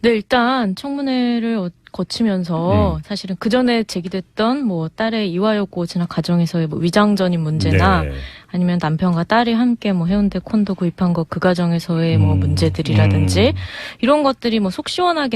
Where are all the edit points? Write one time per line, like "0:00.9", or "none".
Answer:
0:14.1